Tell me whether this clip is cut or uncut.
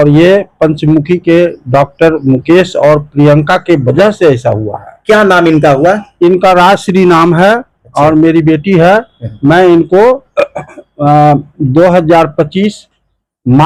uncut